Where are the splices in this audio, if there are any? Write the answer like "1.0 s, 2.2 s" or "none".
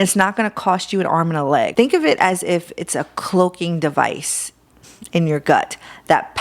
1.7 s